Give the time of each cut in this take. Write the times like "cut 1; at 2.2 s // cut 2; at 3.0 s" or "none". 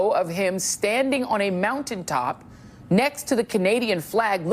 cut 1; at 2.7 s